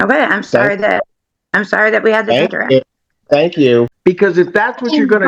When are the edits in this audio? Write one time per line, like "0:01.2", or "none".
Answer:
0:03.9